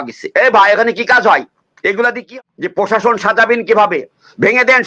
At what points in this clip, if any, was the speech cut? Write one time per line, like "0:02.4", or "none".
0:02.2